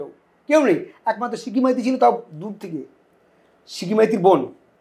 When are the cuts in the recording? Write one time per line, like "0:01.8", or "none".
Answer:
none